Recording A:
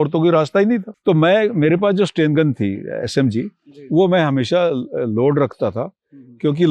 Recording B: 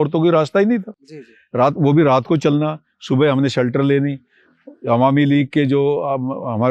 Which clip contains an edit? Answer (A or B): A